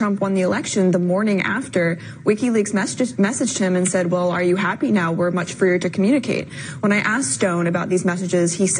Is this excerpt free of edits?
no; 1 cut; at 2.1 s

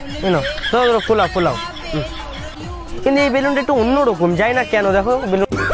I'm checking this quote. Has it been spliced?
yes; 1 cut; at 2.5 s

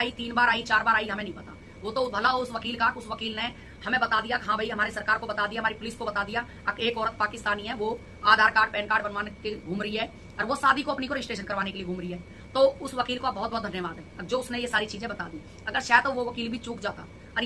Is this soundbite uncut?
yes; 0 cuts

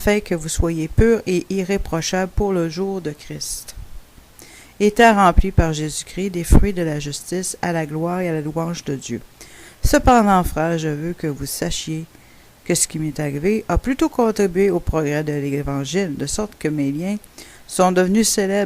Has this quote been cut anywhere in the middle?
no; 0 cuts

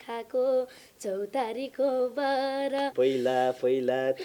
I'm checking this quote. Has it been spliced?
yes; 1 cut; at 2.9 s

